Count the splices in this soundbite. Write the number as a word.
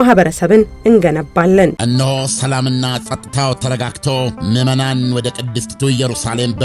one